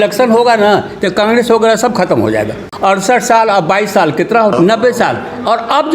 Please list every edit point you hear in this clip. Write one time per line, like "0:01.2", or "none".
0:02.6
0:04.5